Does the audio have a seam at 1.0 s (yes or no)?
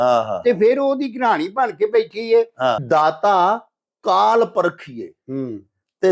no